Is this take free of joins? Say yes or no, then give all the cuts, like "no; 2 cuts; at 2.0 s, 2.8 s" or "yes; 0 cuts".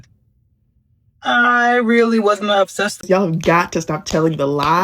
no; 1 cut; at 3.0 s